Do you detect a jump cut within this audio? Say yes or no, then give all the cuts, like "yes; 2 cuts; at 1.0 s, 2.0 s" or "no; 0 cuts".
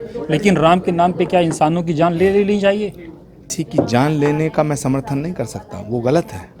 yes; 1 cut; at 3.5 s